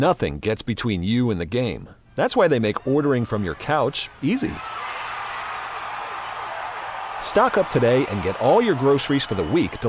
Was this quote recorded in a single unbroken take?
yes; 0 cuts

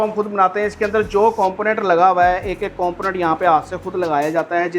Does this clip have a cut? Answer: no; 0 cuts

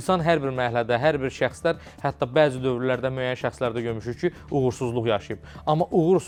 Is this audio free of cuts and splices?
yes; 0 cuts

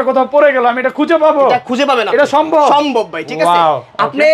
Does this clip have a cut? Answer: no; 0 cuts

